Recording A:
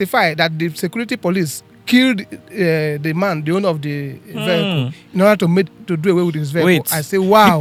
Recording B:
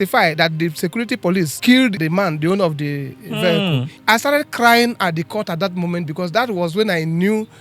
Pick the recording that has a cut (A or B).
B